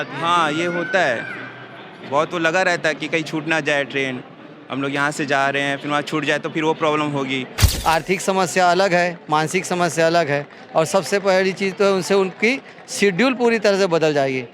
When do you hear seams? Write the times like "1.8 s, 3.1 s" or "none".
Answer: 7.6 s